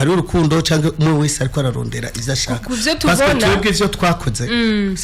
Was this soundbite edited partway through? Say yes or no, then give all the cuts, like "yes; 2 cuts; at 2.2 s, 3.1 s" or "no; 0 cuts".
no; 0 cuts